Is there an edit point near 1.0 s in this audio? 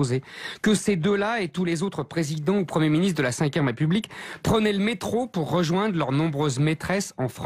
no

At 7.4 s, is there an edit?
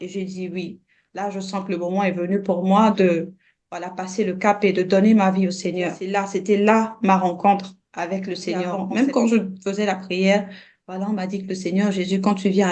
no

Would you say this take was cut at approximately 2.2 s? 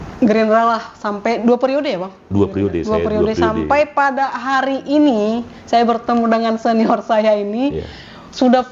no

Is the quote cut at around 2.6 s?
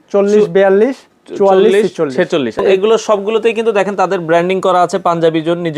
yes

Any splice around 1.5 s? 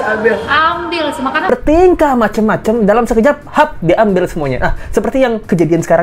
yes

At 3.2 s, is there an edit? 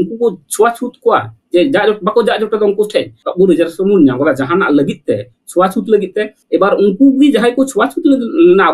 yes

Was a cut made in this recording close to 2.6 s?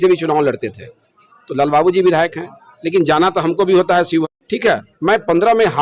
no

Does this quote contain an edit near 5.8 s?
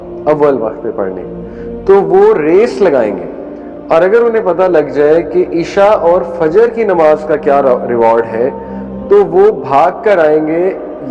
no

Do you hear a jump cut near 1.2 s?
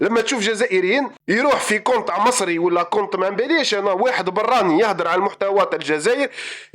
yes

